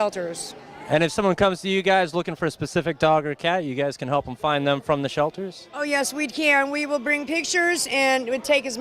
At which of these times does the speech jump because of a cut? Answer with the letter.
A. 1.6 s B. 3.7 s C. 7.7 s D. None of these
C